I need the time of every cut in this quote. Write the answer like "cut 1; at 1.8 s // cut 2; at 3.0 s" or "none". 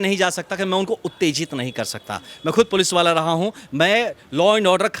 none